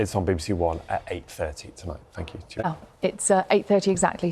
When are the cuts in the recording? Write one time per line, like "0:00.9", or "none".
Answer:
0:02.7